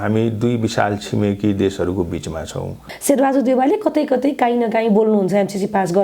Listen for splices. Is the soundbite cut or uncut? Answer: cut